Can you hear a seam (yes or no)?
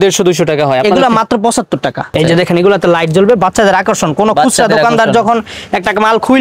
yes